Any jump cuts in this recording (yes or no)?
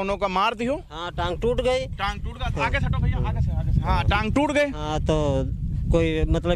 no